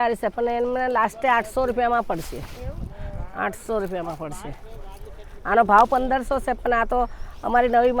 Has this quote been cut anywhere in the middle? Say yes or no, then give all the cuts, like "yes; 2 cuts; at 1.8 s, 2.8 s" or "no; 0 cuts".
no; 0 cuts